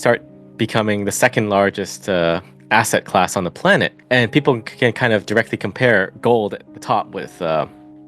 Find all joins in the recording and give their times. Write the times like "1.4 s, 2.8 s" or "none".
4.0 s